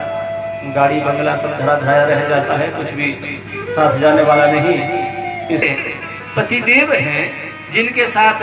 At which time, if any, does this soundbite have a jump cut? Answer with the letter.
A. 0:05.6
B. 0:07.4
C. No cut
A